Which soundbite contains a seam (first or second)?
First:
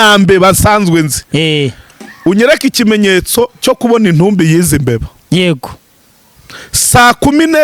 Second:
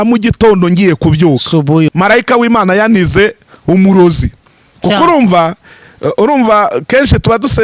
second